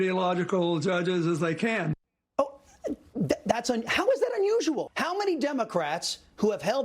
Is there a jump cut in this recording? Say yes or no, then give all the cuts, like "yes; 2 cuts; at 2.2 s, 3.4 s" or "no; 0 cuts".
yes; 2 cuts; at 2.1 s, 4.9 s